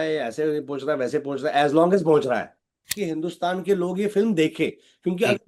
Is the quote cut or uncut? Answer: cut